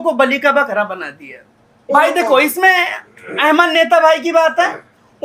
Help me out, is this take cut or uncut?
cut